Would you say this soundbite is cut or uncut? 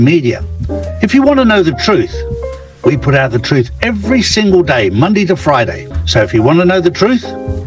cut